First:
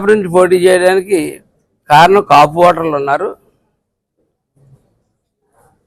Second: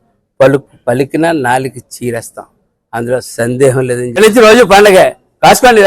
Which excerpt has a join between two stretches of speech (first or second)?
second